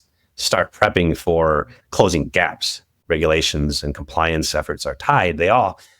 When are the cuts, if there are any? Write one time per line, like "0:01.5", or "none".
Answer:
0:02.9